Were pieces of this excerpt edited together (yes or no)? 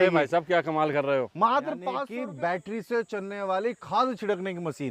yes